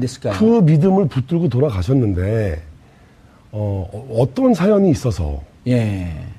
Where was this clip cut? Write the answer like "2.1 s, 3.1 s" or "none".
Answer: 1.3 s